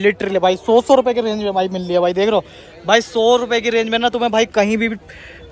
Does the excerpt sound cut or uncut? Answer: uncut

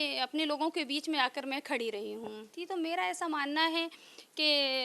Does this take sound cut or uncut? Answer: cut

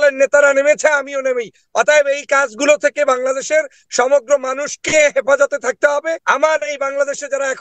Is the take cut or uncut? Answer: cut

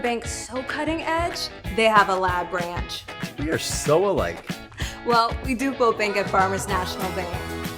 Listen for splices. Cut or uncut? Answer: uncut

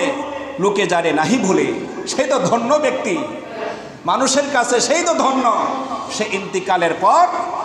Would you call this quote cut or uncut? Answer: uncut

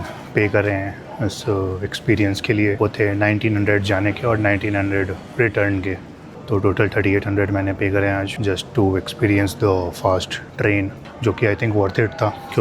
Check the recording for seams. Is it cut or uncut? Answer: uncut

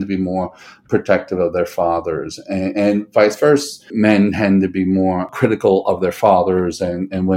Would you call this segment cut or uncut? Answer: cut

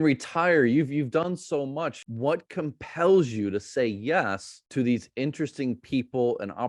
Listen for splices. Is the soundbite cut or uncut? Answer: cut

